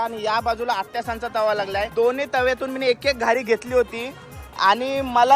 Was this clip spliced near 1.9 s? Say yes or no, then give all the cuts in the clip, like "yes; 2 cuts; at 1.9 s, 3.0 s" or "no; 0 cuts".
yes; 1 cut; at 1.9 s